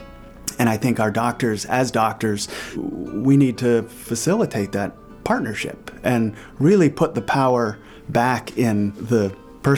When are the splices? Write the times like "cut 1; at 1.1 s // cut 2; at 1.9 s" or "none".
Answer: cut 1; at 2.6 s // cut 2; at 9.0 s

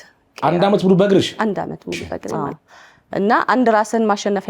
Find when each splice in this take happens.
cut 1; at 2.5 s

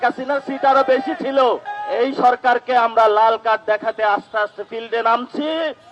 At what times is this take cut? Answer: cut 1; at 1.7 s

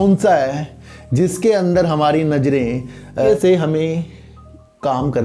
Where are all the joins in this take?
cut 1; at 3.3 s

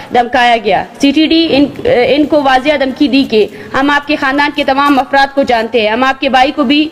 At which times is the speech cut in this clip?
none

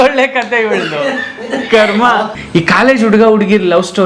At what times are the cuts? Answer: cut 1; at 2.3 s

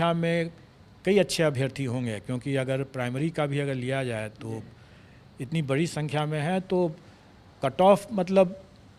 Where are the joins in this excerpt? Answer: none

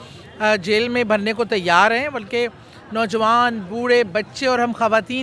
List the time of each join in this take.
none

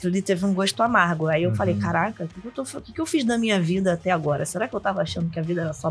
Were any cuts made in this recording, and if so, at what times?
none

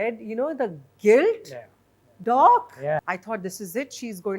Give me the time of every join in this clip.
cut 1; at 3.1 s

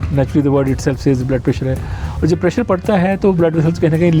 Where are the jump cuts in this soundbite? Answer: none

